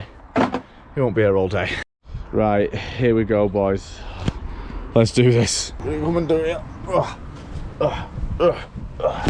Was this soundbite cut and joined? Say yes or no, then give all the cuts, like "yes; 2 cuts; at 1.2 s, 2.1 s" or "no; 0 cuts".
no; 0 cuts